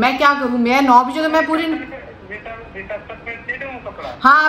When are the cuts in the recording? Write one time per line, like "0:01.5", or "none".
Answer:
none